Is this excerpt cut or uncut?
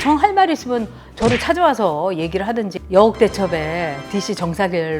cut